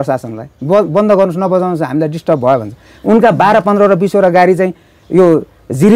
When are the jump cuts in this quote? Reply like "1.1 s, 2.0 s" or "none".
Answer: none